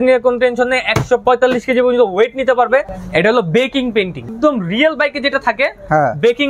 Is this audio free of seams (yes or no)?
no